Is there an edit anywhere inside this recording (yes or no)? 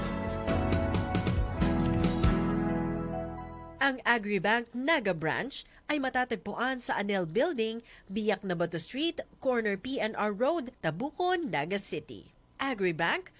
no